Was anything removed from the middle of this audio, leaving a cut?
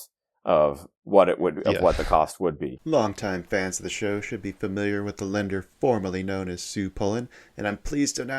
yes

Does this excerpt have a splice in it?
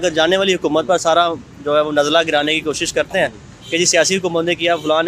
no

